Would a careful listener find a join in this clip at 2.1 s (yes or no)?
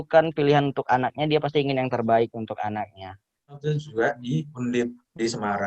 no